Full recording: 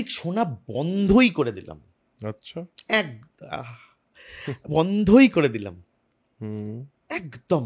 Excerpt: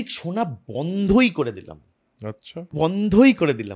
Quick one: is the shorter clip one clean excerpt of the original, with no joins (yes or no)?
no